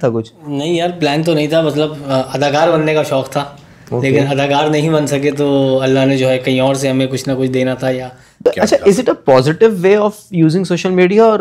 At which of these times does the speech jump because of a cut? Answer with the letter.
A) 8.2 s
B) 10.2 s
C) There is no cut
A